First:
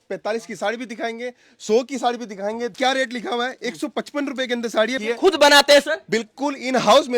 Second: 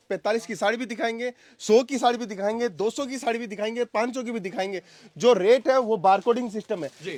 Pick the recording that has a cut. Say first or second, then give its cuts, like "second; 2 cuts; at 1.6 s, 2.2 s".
first; 2 cuts; at 2.7 s, 5.0 s